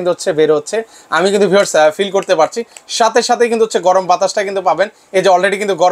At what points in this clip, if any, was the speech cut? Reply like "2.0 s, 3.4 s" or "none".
none

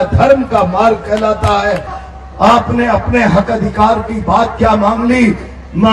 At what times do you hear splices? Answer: 2.0 s

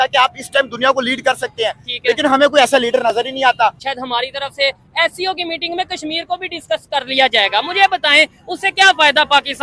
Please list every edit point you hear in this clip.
3.9 s

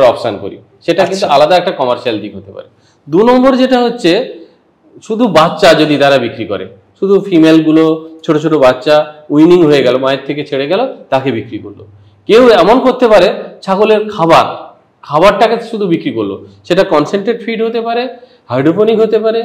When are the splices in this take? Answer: none

